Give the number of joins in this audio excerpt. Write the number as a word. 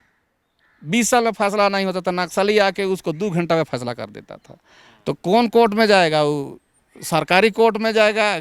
zero